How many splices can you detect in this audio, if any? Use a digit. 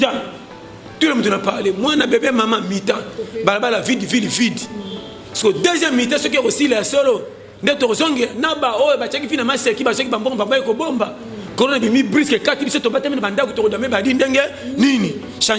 0